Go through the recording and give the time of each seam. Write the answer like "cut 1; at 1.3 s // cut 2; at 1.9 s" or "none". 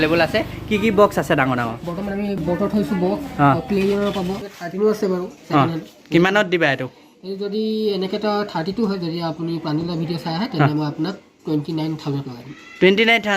cut 1; at 2.4 s // cut 2; at 4.4 s